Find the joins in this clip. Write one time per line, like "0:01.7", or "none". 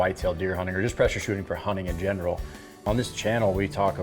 0:02.9

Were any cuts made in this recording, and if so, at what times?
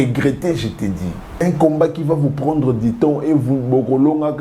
0:01.4

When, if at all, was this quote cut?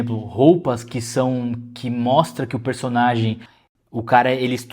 0:03.5

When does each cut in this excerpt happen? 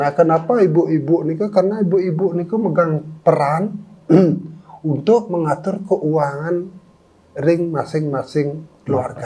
none

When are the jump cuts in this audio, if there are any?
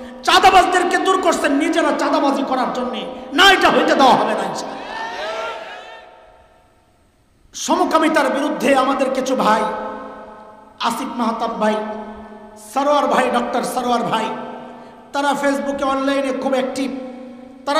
0:06.6

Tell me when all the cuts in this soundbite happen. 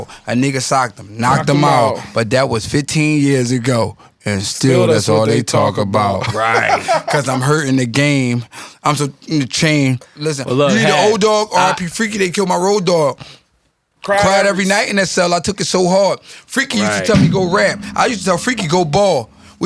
0:10.1

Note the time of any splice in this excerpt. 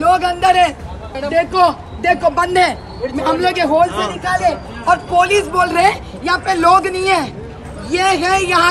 0:01.1

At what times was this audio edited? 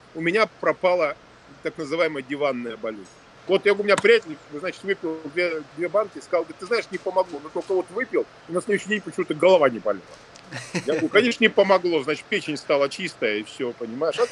0:03.4

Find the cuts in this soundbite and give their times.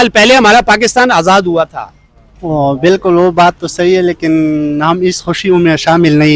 none

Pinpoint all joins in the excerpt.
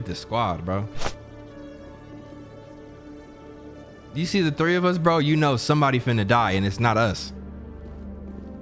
none

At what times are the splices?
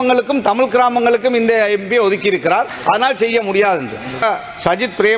0:04.2

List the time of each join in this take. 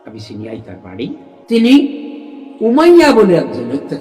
0:01.3

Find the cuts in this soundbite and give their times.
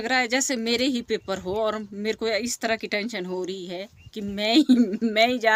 none

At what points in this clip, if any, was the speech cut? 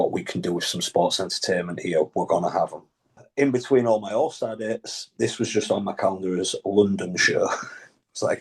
0:03.2

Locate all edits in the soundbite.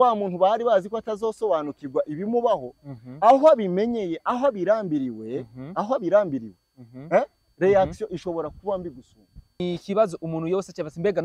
0:09.6

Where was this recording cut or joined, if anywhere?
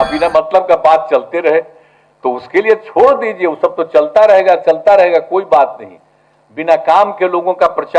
none

